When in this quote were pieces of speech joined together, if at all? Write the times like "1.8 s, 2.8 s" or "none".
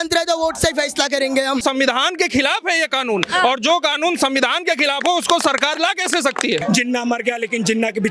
1.6 s, 6.6 s

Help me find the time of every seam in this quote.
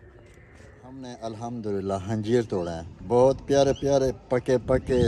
1.0 s

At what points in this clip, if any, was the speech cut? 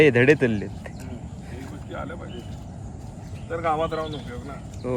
none

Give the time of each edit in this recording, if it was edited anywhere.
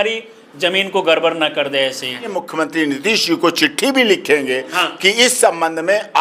2.3 s

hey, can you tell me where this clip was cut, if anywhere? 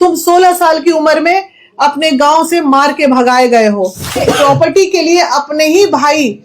4.2 s

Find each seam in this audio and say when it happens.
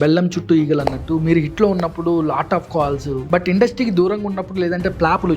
3.2 s

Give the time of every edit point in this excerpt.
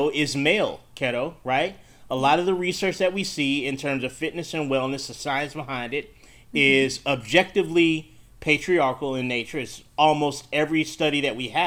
none

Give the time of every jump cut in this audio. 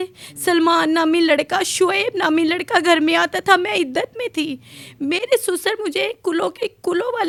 none

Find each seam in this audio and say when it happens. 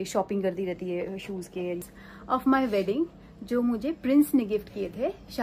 1.9 s

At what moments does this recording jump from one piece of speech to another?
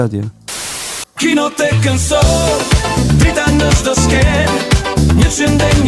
0.9 s

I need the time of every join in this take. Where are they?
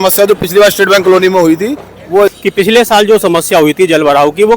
2.4 s

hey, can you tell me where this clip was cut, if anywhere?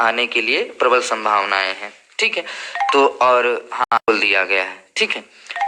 4.1 s

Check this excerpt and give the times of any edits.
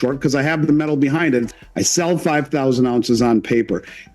1.5 s

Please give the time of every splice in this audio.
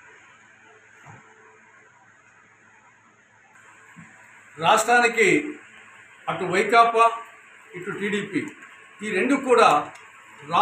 3.0 s

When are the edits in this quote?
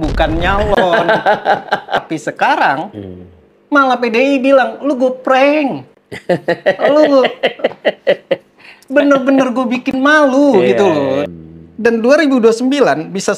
2.1 s, 11.3 s

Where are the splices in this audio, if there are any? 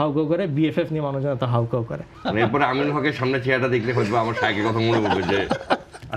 2.0 s

